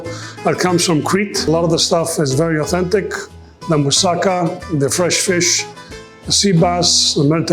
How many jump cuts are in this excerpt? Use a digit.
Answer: 1